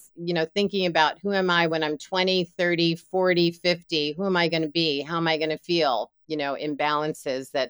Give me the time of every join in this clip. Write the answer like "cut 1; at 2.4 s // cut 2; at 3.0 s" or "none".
cut 1; at 6.2 s